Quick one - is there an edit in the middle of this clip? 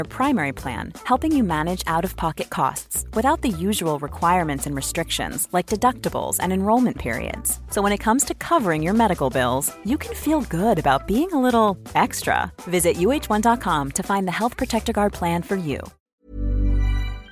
yes; 1 cut; at 15.9 s

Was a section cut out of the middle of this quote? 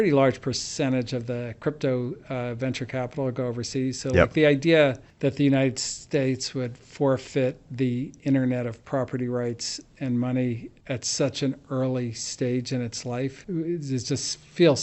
yes; 3 cuts; at 5.1 s, 10.7 s, 13.4 s

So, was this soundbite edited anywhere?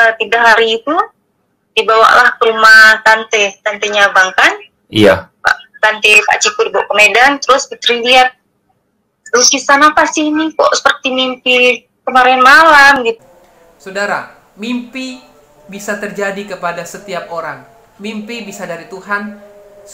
yes; 1 cut; at 13.2 s

